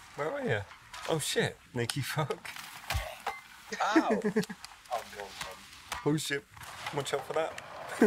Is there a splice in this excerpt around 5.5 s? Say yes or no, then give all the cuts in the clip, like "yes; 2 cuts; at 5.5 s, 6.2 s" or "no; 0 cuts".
no; 0 cuts